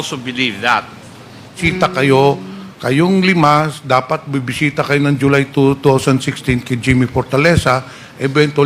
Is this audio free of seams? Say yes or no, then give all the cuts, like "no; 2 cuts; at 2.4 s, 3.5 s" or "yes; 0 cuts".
no; 1 cut; at 1.6 s